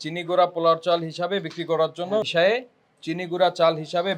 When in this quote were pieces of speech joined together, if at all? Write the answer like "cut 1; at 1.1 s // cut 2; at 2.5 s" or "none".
cut 1; at 2.3 s